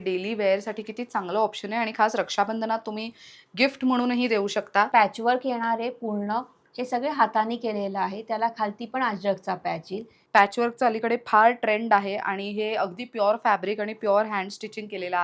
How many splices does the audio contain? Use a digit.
2